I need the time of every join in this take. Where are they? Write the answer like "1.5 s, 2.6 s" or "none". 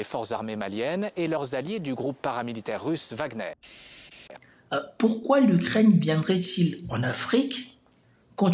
4.1 s